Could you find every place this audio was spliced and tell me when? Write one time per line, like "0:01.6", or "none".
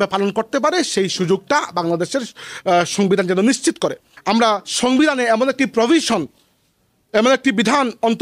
0:04.1